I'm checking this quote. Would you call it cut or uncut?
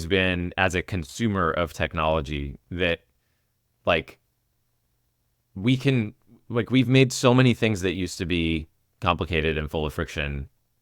uncut